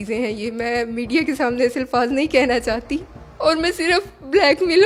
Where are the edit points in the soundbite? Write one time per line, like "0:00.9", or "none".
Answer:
none